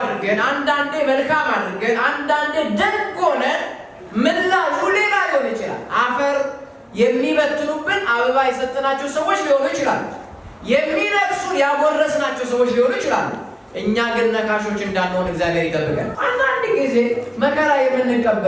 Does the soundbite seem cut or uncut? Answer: cut